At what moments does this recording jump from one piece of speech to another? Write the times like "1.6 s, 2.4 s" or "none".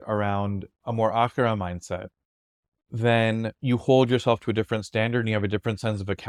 none